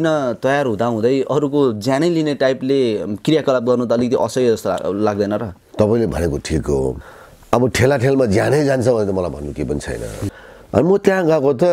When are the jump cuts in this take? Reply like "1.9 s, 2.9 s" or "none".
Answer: 7.0 s, 10.2 s